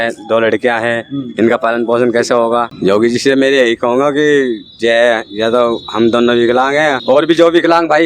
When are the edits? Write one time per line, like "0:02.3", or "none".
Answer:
0:02.7
0:07.0